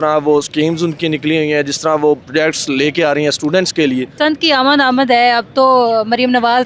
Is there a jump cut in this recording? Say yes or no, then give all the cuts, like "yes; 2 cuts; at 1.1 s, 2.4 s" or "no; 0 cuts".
yes; 2 cuts; at 2.2 s, 4.1 s